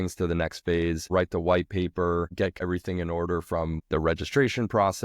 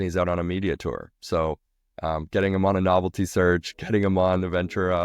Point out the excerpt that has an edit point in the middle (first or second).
first